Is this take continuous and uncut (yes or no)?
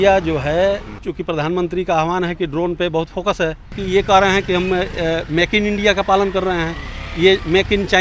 no